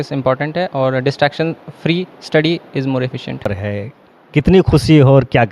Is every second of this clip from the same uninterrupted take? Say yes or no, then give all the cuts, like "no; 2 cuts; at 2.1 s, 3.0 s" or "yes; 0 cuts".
no; 1 cut; at 3.6 s